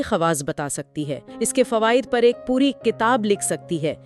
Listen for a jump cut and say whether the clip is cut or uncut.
cut